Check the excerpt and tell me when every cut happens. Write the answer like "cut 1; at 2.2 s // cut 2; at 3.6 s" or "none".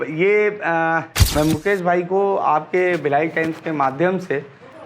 cut 1; at 1.2 s